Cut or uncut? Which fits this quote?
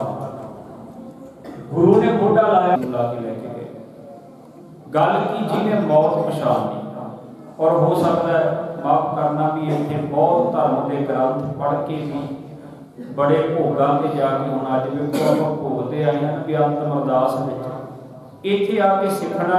cut